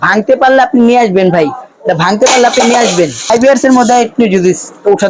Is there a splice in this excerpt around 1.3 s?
no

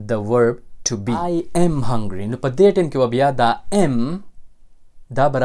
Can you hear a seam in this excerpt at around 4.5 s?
no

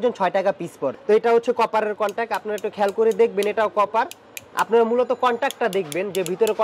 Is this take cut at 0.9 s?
yes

